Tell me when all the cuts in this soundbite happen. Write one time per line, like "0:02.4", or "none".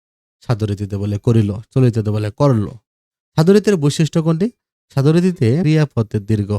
0:05.6